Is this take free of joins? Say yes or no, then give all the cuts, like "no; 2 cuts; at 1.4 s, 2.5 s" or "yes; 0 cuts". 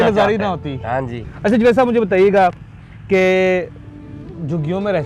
yes; 0 cuts